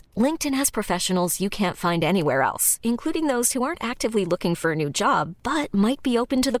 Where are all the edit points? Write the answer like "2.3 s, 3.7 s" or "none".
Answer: none